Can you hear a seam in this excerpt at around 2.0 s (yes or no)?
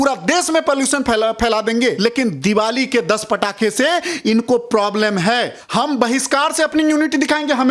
yes